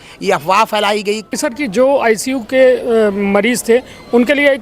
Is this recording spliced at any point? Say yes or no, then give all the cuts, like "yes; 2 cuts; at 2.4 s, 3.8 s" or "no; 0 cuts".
yes; 1 cut; at 1.4 s